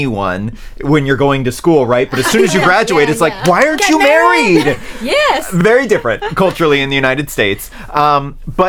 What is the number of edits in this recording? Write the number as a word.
zero